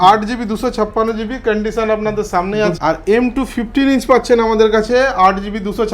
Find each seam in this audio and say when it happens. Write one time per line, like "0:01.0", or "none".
0:02.8